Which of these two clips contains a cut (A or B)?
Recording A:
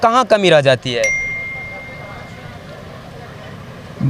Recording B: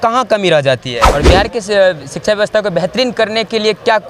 B